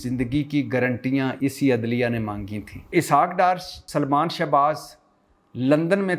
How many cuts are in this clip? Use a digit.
3